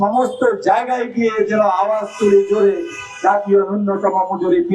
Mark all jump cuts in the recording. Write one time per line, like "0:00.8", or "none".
none